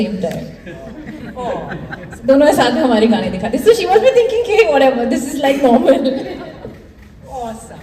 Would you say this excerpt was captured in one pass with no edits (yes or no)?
yes